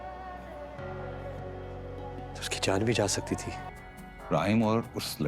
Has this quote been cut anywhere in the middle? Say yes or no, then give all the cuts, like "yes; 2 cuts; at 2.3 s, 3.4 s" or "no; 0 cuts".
yes; 1 cut; at 3.7 s